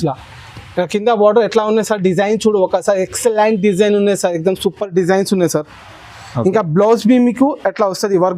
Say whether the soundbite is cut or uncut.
uncut